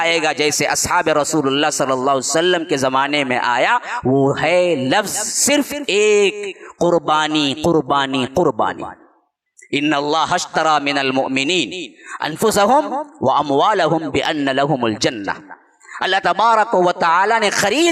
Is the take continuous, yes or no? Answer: yes